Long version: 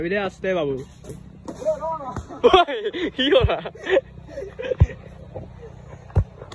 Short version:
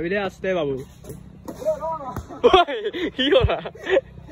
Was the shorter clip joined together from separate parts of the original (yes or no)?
no